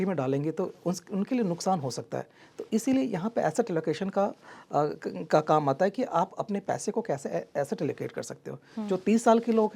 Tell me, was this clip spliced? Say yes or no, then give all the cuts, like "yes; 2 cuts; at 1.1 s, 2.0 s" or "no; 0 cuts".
no; 0 cuts